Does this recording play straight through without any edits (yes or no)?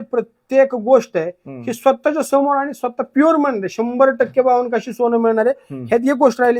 yes